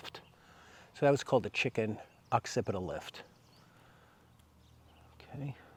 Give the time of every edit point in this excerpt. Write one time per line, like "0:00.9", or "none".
none